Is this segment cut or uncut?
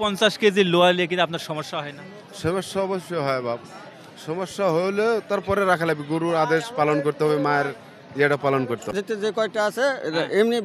cut